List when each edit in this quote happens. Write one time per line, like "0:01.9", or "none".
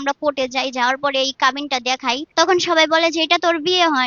0:02.2

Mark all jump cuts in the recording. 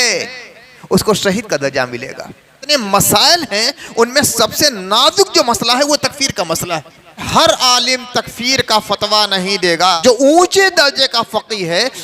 0:02.7
0:07.3
0:10.0

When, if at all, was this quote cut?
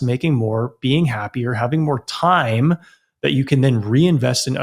none

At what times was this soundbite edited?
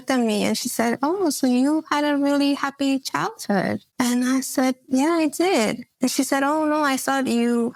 none

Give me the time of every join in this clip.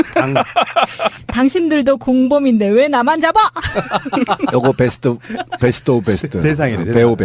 0:03.7

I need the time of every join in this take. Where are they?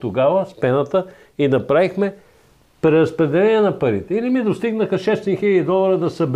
none

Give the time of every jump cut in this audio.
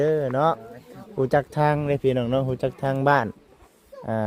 none

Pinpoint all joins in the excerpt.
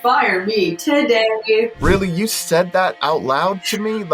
0:01.8

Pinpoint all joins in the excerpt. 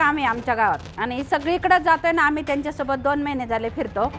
0:00.9

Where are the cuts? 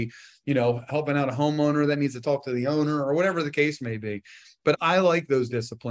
0:04.8

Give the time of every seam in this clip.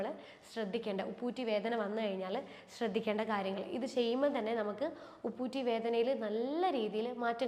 none

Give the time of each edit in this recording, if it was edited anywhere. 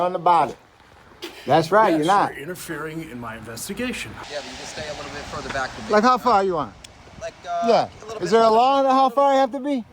0:04.0

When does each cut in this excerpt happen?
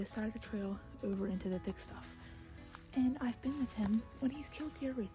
none

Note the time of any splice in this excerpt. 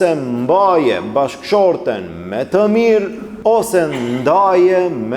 0:03.2

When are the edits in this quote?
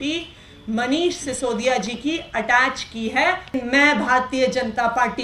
0:03.5

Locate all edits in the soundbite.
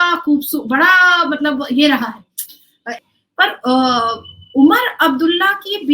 0:03.0

